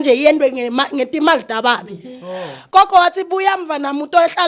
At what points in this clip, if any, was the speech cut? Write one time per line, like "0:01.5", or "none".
0:02.6